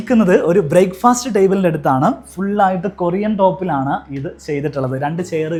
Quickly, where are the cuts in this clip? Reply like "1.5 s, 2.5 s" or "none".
none